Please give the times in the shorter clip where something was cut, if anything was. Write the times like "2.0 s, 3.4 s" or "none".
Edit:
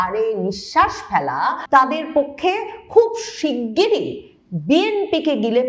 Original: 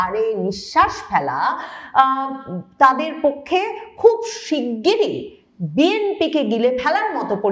1.6 s